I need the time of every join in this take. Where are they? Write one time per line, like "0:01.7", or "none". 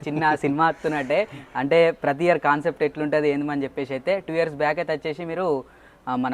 none